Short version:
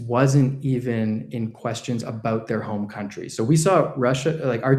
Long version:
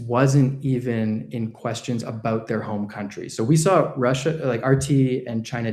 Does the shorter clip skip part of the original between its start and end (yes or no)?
no